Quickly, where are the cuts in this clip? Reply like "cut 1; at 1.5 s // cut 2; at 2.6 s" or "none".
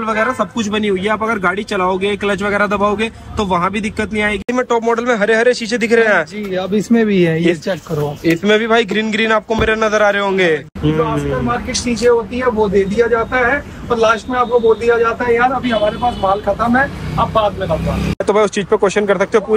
cut 1; at 4.5 s // cut 2; at 10.7 s // cut 3; at 18.2 s